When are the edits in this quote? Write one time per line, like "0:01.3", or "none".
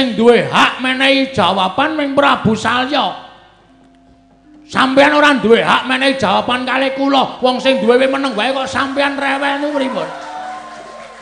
none